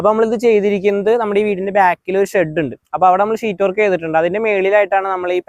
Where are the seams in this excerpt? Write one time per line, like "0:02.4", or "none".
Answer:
none